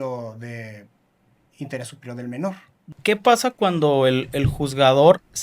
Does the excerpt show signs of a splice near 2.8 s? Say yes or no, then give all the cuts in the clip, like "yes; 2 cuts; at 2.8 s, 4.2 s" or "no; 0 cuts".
yes; 1 cut; at 2.8 s